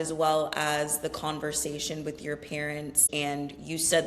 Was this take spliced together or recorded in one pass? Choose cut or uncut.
cut